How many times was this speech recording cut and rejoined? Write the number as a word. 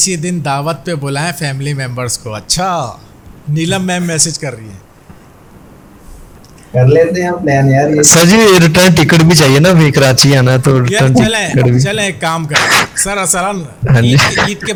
zero